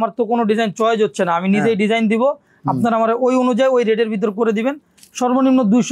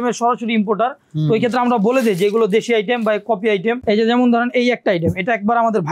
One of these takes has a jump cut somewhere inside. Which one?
second; 1 cut; at 3.8 s

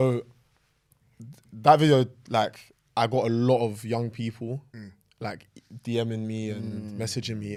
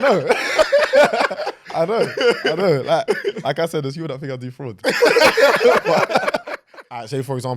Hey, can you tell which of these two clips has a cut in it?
second; 1 cut; at 6.5 s

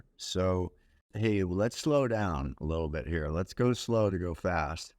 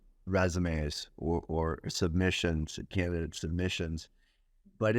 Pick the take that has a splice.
first; 1 cut; at 1.1 s

